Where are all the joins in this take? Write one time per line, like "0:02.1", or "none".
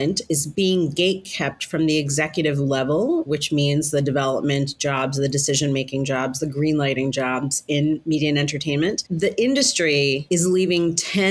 0:03.3
0:09.1

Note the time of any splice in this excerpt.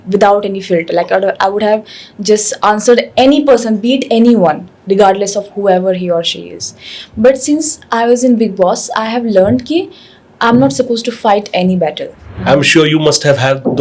0:12.3

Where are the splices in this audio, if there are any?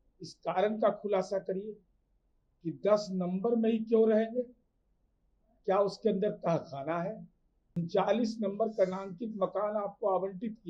0:07.8

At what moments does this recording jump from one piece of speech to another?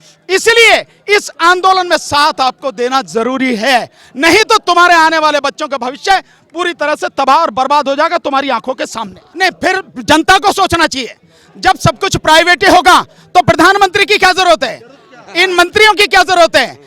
0:09.2

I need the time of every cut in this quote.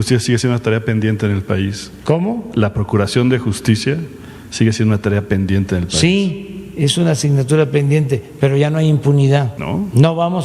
0:09.6

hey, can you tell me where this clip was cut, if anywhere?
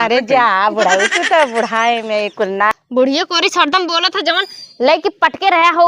0:02.7

